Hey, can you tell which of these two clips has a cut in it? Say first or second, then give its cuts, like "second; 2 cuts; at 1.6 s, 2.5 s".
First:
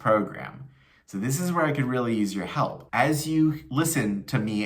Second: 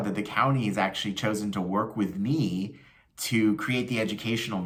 first; 1 cut; at 2.8 s